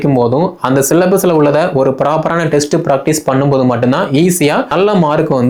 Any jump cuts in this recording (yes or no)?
no